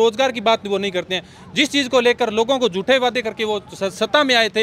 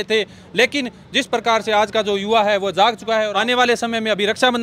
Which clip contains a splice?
second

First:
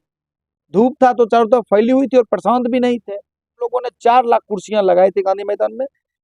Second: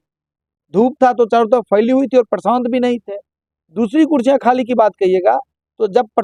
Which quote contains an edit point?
first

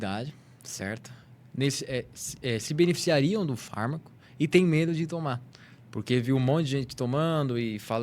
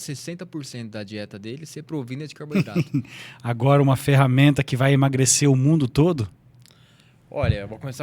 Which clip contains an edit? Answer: second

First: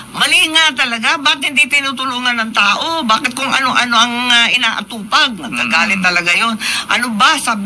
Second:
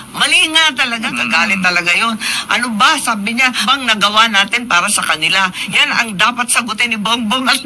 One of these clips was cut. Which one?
second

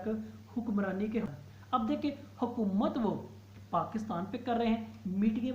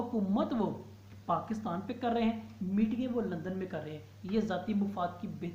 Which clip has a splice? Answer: first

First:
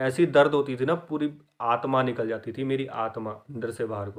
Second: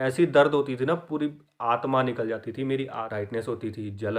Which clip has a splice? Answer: second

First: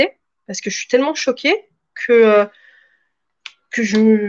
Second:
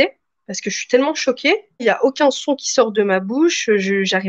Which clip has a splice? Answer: second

